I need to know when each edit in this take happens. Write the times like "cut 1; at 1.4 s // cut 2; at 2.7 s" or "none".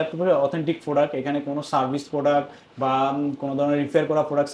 none